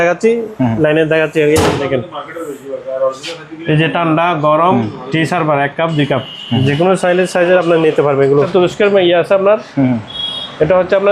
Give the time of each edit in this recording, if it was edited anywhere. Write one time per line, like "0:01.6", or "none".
0:08.5